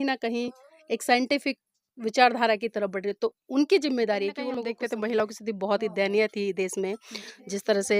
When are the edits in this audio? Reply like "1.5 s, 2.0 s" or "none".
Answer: 4.7 s